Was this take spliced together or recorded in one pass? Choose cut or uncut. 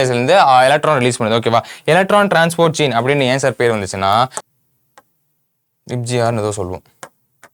cut